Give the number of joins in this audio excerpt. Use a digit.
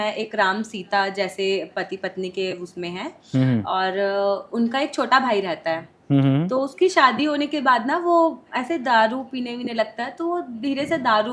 0